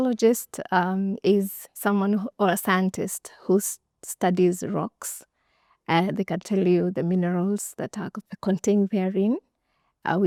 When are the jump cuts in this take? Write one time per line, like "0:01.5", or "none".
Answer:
none